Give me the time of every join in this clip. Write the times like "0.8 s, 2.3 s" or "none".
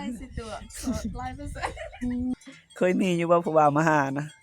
2.3 s